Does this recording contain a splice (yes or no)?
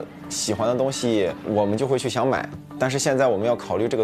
yes